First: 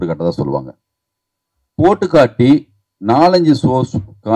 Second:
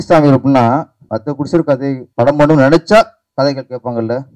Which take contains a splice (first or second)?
second